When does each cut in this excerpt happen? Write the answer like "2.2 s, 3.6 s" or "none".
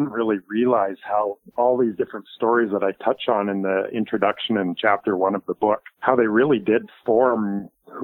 1.4 s, 5.9 s